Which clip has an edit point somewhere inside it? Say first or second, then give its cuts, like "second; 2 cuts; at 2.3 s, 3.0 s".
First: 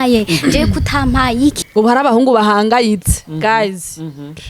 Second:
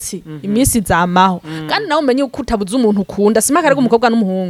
first; 1 cut; at 1.6 s